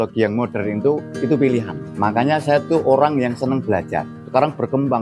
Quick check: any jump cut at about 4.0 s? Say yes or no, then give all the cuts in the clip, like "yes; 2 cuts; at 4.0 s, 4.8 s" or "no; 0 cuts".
yes; 3 cuts; at 1.1 s, 1.9 s, 4.0 s